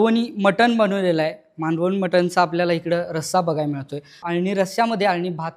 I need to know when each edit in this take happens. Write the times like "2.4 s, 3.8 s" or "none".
4.2 s